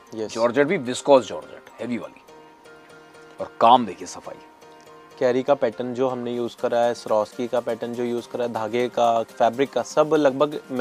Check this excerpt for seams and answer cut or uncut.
uncut